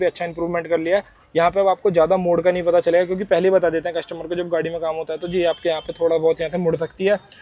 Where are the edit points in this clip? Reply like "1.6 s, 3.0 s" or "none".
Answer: none